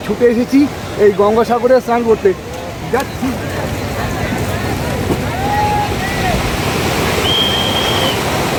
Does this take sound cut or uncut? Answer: uncut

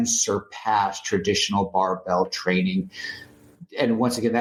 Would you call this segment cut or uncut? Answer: uncut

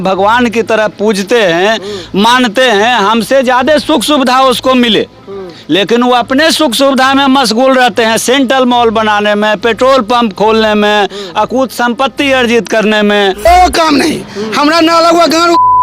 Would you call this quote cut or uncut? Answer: cut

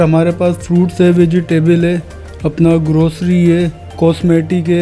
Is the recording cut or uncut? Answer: uncut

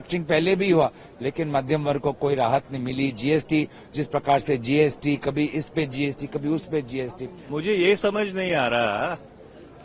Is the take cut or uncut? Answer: cut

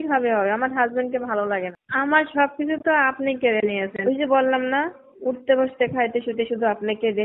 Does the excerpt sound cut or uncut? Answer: cut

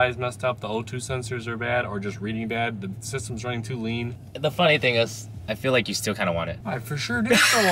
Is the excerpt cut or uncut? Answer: cut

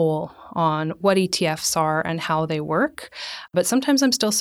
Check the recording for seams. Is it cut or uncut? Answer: cut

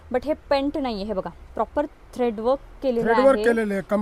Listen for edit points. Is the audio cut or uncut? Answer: uncut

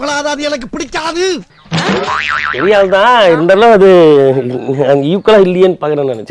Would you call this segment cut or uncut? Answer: uncut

